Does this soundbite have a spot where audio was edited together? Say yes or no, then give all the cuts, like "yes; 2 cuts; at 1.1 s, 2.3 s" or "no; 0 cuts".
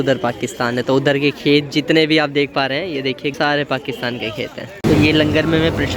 yes; 2 cuts; at 3.4 s, 4.7 s